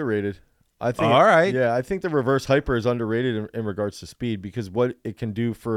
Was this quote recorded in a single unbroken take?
yes; 0 cuts

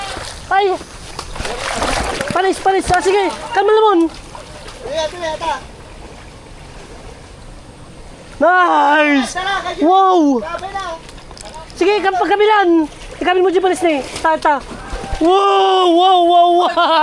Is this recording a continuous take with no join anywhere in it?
yes; 0 cuts

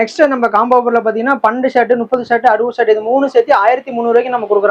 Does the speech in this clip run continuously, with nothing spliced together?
yes; 0 cuts

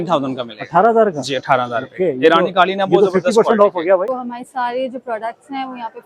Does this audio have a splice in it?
yes; 1 cut; at 4.1 s

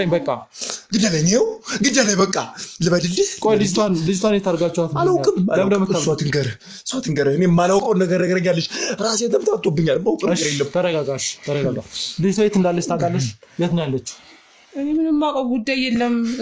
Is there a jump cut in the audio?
no; 0 cuts

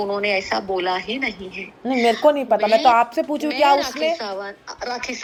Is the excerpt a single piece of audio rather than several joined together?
yes; 0 cuts

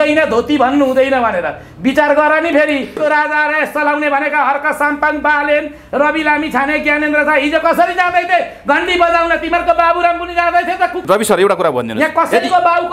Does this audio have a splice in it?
yes; 2 cuts; at 3.0 s, 11.0 s

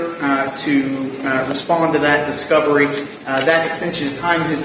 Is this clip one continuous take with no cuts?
yes; 0 cuts

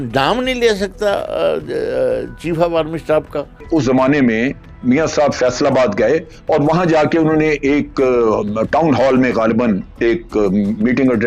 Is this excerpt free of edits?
no; 1 cut; at 3.5 s

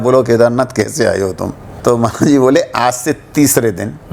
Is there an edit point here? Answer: yes; 1 cut; at 1.7 s

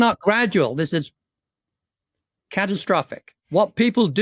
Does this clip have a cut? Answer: no; 0 cuts

